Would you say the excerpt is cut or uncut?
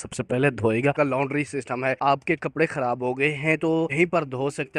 cut